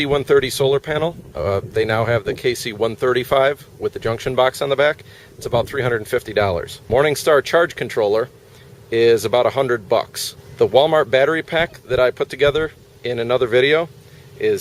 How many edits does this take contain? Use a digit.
1